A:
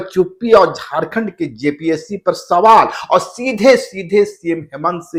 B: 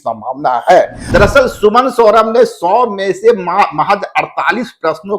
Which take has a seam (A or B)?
B